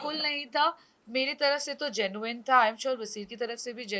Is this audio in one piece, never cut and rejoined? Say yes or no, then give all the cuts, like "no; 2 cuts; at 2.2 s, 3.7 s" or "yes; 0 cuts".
yes; 0 cuts